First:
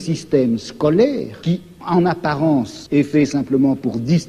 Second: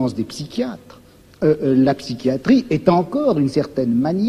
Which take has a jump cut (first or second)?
first